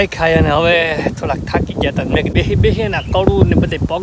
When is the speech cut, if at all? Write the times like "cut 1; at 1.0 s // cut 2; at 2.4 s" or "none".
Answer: cut 1; at 2.3 s